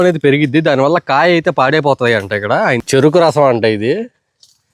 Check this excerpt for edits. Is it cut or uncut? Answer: cut